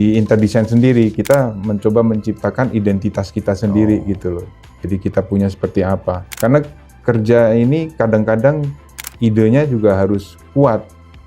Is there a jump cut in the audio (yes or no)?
yes